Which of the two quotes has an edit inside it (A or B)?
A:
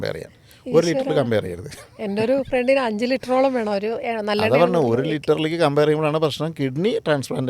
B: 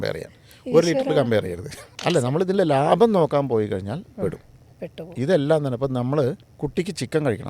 B